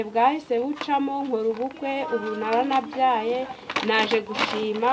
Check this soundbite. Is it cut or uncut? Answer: uncut